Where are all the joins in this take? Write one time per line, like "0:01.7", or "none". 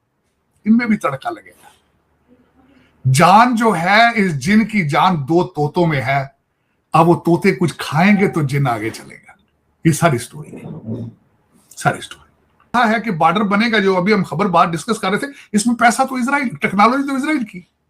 0:12.7